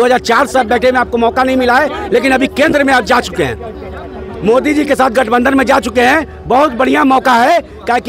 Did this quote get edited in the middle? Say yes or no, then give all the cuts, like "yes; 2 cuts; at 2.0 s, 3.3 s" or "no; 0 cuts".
no; 0 cuts